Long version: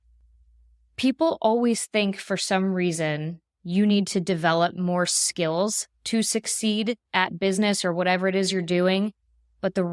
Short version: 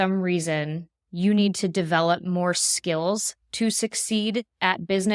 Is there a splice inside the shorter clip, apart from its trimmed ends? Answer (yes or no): no